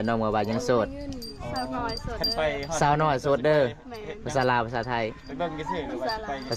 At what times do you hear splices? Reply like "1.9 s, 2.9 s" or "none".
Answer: none